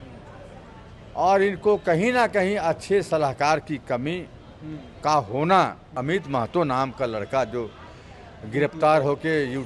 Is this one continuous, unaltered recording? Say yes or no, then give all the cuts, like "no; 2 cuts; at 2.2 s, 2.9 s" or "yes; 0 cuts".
no; 1 cut; at 5.8 s